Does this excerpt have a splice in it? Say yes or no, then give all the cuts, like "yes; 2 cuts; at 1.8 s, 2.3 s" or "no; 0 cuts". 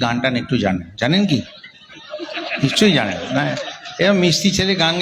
no; 0 cuts